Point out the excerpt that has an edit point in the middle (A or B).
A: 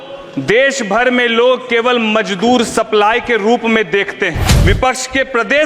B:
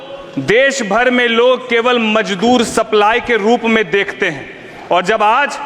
A